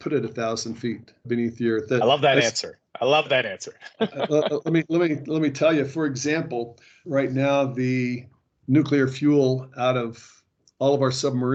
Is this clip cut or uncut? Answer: uncut